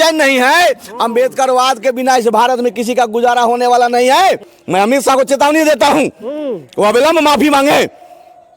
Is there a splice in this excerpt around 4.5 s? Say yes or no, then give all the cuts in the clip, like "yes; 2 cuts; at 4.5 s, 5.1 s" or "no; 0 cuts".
yes; 1 cut; at 4.5 s